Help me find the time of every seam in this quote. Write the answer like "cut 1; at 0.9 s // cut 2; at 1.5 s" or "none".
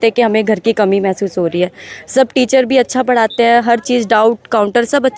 none